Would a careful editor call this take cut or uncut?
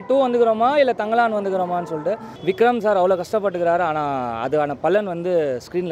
cut